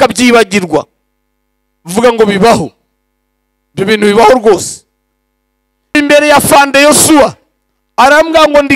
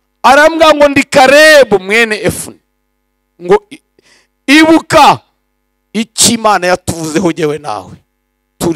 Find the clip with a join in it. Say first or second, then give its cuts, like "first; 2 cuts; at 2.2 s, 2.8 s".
first; 1 cut; at 5.9 s